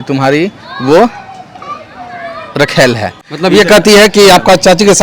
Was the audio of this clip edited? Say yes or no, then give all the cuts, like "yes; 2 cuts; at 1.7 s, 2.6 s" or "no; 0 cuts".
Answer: yes; 1 cut; at 3.2 s